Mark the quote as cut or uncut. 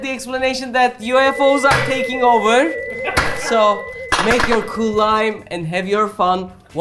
uncut